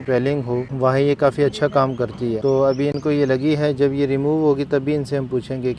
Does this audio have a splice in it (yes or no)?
no